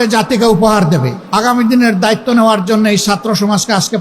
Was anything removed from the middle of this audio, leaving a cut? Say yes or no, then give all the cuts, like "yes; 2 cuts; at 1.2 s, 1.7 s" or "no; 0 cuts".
yes; 1 cut; at 1.2 s